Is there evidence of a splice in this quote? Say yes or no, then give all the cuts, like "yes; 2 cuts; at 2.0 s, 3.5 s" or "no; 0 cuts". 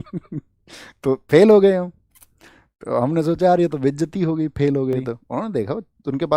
yes; 1 cut; at 5.2 s